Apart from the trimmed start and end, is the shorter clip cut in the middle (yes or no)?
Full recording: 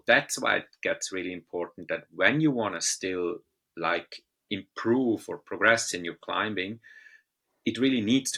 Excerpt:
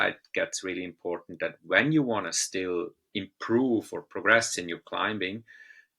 yes